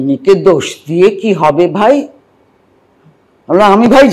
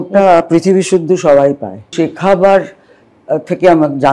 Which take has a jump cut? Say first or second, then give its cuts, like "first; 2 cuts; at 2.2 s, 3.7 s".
second; 1 cut; at 1.9 s